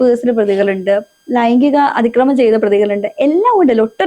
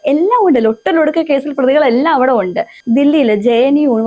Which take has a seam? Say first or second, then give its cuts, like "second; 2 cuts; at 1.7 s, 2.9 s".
second; 1 cut; at 2.8 s